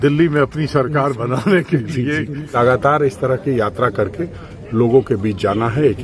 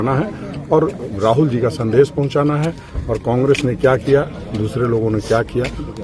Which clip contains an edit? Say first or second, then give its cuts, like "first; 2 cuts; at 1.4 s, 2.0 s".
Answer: first; 1 cut; at 2.6 s